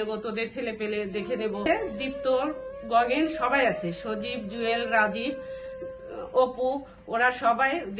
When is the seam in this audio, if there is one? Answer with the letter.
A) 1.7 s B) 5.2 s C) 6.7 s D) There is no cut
A